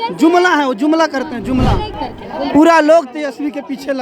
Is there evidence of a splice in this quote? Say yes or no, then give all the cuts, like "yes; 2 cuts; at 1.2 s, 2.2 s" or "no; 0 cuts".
yes; 1 cut; at 1.9 s